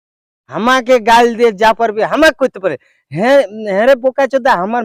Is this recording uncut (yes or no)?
yes